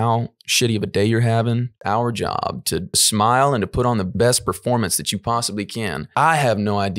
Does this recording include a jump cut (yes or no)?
yes